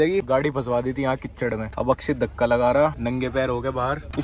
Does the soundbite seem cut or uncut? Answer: uncut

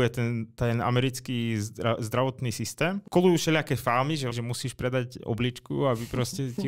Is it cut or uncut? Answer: cut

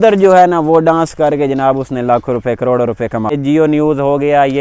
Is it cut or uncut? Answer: cut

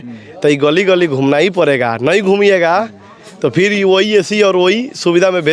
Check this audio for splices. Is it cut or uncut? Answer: uncut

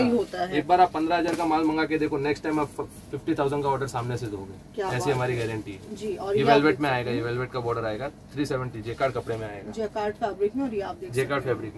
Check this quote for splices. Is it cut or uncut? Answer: uncut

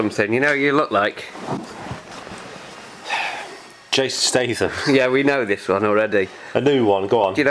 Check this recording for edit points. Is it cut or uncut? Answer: uncut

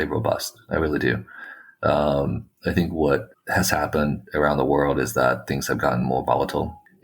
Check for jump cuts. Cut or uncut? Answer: uncut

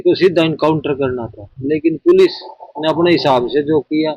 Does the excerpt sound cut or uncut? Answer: uncut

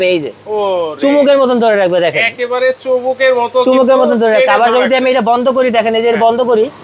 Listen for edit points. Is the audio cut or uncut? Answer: uncut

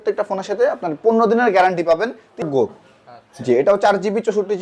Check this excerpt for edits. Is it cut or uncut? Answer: cut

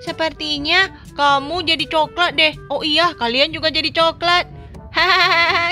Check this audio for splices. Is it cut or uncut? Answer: uncut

